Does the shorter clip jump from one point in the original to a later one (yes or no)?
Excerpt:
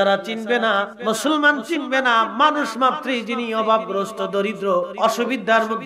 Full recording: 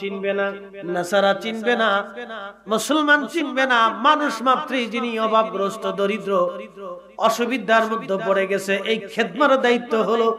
yes